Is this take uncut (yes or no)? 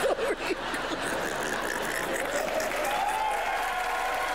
yes